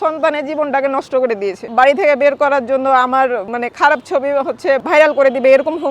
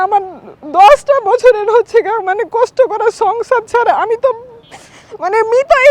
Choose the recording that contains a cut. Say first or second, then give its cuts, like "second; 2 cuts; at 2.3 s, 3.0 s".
first; 3 cuts; at 1.6 s, 3.5 s, 4.8 s